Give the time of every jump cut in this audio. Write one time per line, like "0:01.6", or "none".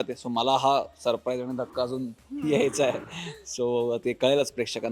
none